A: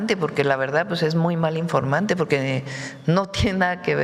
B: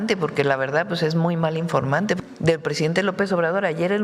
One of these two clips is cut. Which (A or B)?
B